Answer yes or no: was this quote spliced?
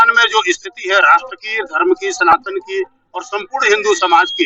no